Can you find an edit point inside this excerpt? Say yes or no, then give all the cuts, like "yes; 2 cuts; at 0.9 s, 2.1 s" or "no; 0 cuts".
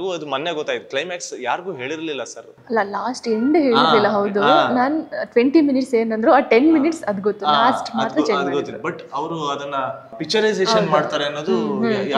yes; 1 cut; at 10.1 s